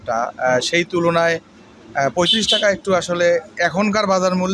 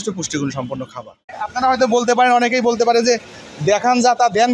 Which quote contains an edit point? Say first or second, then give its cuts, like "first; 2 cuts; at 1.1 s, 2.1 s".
second; 1 cut; at 1.3 s